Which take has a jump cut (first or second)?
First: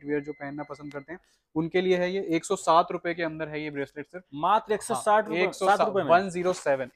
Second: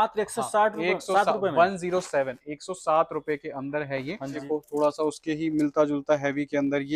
second